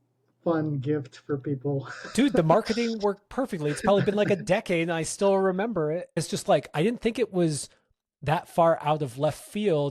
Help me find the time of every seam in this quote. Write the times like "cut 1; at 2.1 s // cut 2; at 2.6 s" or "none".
cut 1; at 6.2 s